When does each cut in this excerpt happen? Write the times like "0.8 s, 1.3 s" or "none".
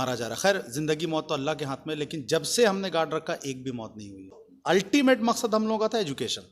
4.5 s